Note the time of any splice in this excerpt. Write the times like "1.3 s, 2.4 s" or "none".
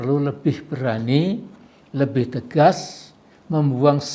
none